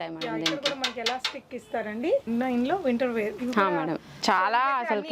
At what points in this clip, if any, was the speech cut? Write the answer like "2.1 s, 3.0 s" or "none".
2.2 s